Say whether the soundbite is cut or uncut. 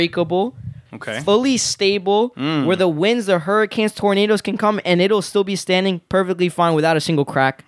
uncut